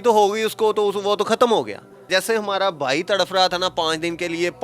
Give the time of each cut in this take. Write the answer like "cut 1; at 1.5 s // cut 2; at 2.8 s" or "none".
cut 1; at 2.1 s